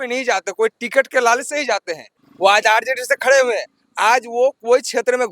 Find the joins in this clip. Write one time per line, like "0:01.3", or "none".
0:02.2